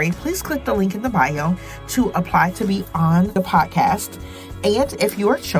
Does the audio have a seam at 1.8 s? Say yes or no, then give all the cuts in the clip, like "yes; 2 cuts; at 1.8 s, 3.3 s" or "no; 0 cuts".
no; 1 cut; at 3.3 s